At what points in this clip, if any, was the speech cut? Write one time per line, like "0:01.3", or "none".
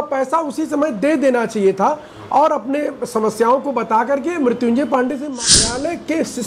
0:05.5